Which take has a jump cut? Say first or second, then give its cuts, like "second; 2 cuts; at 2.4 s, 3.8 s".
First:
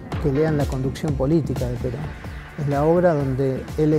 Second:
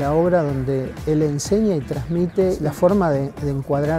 second; 1 cut; at 2.6 s